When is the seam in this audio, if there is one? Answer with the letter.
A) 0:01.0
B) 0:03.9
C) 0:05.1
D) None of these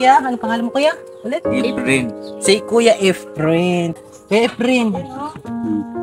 B